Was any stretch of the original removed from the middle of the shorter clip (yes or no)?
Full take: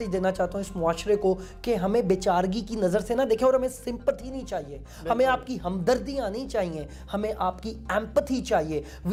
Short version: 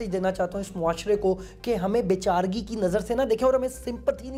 no